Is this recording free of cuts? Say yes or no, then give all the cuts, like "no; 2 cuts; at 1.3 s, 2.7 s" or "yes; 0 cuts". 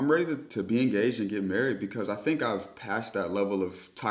yes; 0 cuts